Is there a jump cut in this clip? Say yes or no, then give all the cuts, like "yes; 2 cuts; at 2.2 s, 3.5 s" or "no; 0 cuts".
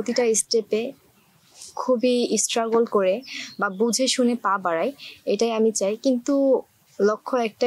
no; 0 cuts